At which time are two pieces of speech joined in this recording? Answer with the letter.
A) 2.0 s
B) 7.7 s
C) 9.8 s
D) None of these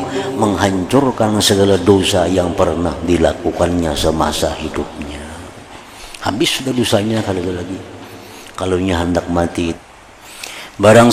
C